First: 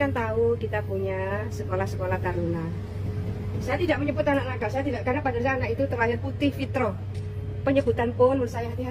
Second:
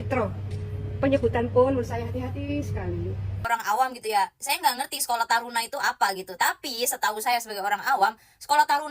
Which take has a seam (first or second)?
second